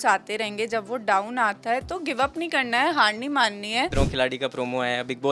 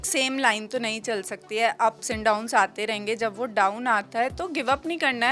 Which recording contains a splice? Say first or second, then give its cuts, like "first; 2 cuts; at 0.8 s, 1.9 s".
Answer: first; 1 cut; at 3.9 s